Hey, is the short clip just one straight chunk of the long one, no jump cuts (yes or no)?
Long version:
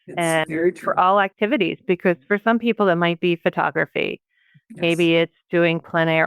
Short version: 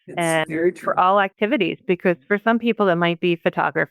yes